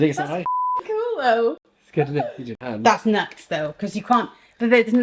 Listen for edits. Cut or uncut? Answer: cut